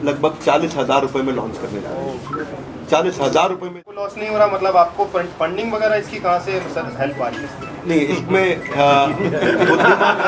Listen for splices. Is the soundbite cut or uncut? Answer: cut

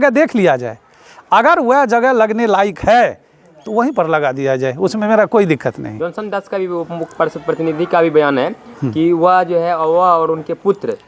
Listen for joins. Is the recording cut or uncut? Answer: uncut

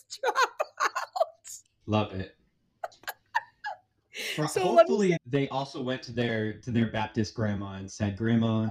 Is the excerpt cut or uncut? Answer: cut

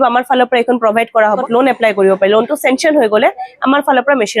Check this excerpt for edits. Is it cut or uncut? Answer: cut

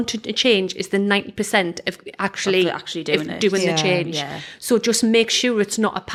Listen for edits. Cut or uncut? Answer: uncut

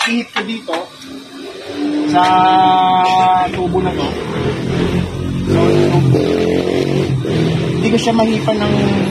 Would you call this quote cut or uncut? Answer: uncut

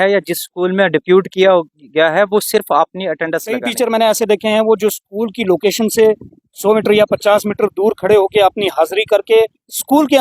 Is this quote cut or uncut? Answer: cut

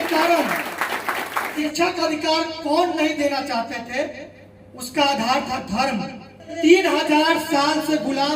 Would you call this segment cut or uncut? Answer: cut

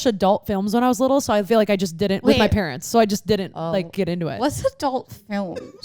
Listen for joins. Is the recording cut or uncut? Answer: uncut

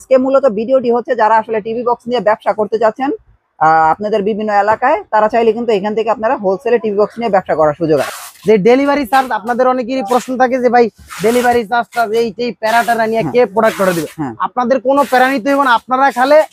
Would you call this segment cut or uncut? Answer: cut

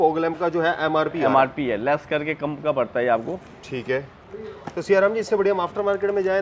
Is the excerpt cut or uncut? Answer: uncut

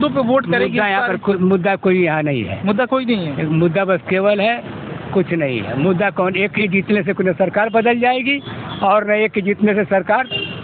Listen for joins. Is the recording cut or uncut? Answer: uncut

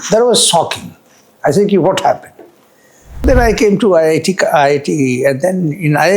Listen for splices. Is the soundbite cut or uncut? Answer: cut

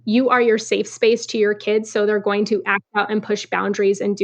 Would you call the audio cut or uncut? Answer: uncut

